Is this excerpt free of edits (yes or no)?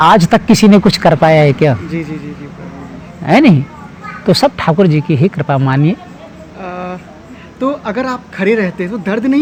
yes